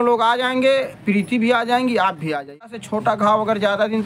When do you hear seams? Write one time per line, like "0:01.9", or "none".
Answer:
0:02.7

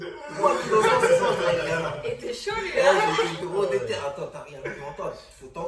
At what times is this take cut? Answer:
none

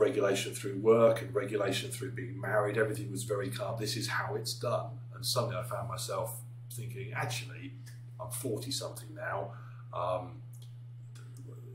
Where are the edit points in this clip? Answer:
none

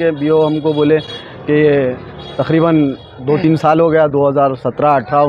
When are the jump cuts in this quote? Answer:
none

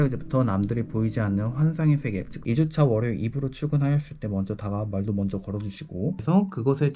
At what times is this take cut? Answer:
0:02.3
0:06.2

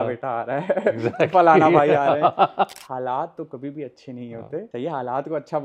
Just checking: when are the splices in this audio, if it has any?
0:02.8
0:04.7

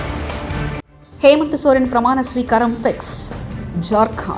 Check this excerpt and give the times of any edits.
none

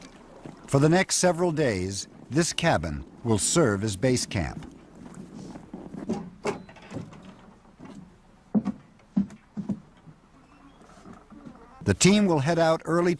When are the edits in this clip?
0:09.4

